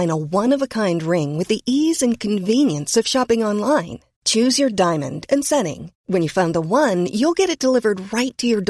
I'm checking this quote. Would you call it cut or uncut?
uncut